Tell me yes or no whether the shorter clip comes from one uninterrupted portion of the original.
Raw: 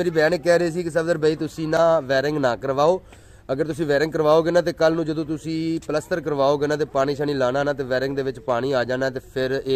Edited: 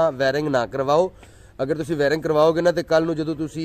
yes